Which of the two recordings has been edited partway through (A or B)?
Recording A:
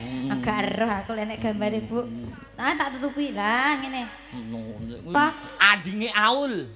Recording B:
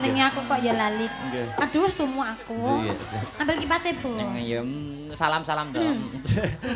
A